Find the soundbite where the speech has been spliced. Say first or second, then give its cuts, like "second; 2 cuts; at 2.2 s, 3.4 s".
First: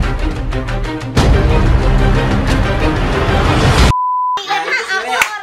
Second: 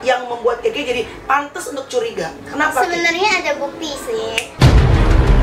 first; 1 cut; at 4.4 s